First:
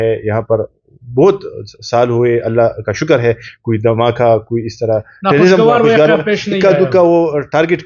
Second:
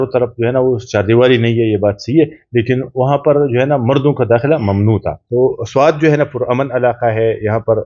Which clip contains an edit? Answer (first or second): second